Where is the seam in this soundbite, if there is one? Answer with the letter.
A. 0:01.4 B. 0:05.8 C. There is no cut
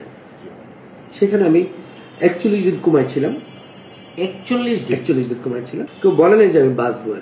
B